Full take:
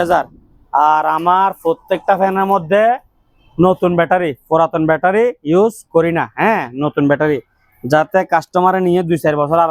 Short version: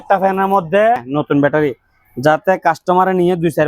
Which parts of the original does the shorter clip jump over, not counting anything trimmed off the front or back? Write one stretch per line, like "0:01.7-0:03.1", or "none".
0:03.0-0:06.7